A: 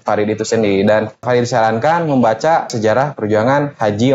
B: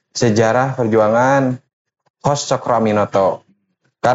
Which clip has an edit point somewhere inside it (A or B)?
A